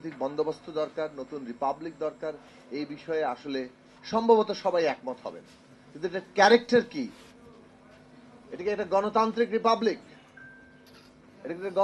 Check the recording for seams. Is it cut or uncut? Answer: uncut